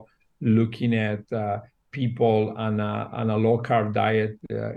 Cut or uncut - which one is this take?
uncut